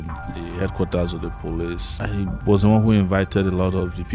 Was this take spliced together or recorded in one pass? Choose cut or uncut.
cut